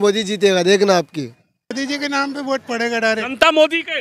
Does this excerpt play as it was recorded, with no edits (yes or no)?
no